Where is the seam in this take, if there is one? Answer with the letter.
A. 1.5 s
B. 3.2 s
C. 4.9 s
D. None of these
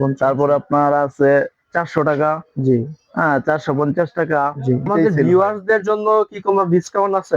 C